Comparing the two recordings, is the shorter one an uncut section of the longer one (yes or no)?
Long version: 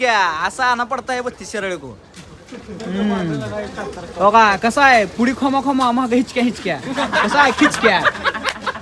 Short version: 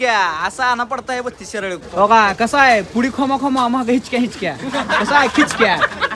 no